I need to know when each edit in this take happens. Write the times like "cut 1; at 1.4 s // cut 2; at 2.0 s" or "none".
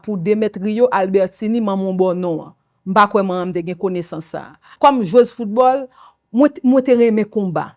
cut 1; at 4.7 s